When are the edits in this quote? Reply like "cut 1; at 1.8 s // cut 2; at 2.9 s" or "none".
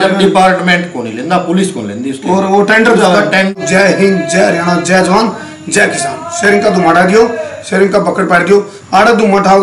cut 1; at 3.6 s